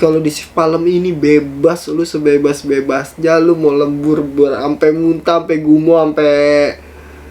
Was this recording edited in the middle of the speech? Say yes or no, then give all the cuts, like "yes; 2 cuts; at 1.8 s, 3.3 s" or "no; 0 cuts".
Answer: no; 0 cuts